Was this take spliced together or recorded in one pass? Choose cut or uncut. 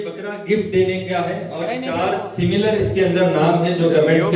uncut